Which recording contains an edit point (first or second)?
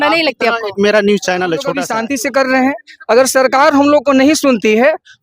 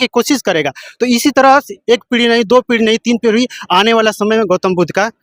first